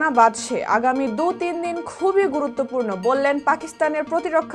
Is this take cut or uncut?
uncut